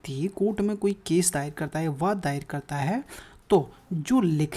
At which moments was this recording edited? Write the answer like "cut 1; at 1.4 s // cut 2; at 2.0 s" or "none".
none